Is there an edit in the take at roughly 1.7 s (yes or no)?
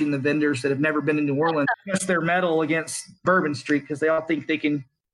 yes